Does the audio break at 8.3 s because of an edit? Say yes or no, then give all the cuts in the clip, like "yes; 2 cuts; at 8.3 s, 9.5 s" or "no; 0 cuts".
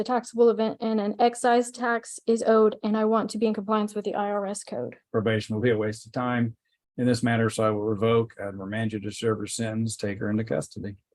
no; 1 cut; at 5.0 s